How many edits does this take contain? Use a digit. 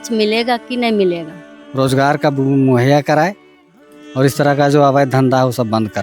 1